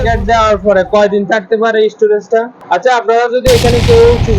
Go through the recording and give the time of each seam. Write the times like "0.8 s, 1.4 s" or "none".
2.6 s